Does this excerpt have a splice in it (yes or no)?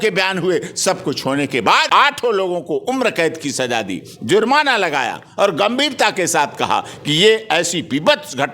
yes